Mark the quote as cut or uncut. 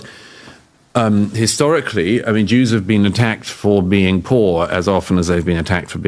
uncut